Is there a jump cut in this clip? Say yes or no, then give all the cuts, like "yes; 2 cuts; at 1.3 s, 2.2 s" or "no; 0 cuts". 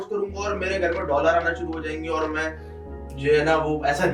no; 0 cuts